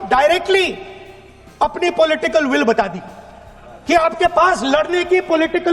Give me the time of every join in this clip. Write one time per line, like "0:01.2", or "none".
none